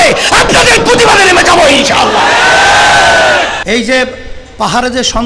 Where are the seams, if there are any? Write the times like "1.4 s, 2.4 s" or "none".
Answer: 4.1 s